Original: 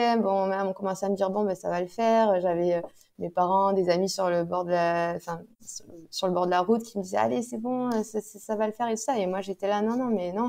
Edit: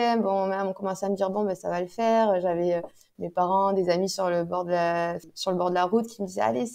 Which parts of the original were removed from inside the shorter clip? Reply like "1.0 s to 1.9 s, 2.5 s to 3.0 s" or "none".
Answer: 5.3 s to 6.0 s